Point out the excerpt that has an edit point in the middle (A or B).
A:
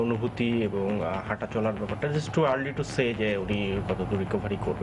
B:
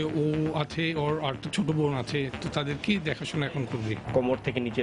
B